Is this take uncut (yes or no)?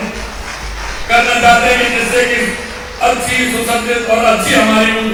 yes